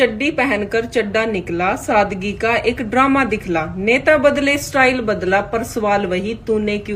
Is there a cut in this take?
no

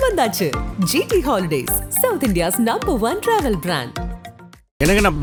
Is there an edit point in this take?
no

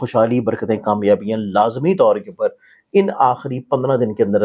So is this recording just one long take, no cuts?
yes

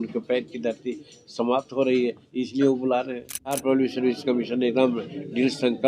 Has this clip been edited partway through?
yes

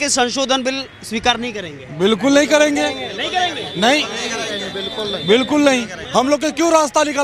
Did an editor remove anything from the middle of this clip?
yes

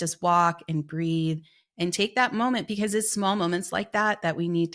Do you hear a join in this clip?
no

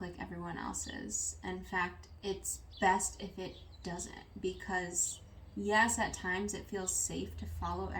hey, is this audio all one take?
no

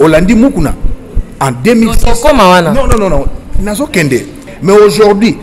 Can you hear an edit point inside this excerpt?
yes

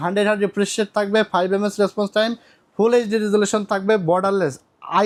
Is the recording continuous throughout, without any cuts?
yes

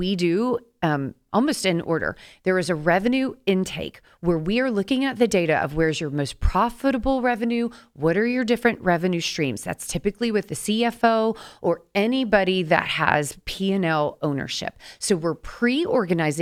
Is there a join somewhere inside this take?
no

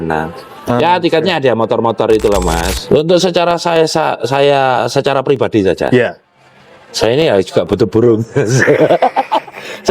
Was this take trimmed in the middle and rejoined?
yes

